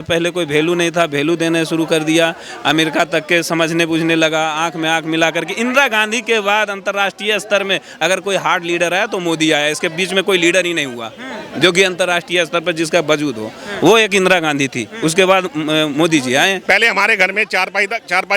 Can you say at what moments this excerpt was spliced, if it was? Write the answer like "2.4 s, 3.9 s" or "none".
16.6 s